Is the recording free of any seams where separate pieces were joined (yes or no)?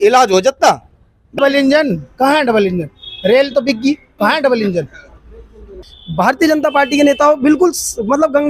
no